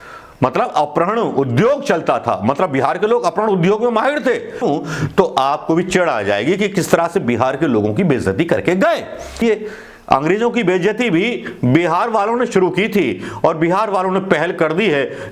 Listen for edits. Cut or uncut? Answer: cut